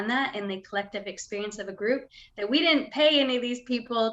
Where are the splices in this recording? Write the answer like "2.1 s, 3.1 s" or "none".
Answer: none